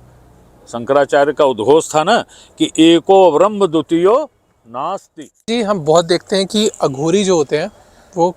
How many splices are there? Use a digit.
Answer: 1